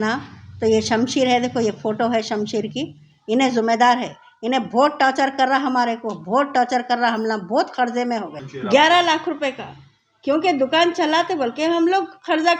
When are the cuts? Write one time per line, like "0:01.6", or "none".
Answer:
0:08.4